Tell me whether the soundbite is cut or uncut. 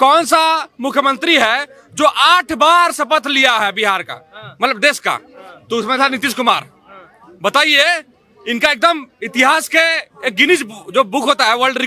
uncut